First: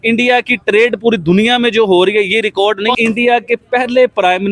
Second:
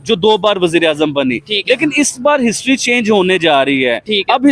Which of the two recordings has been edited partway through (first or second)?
first